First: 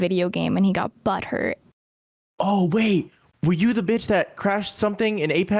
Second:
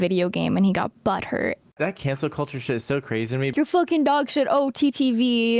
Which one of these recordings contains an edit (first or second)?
second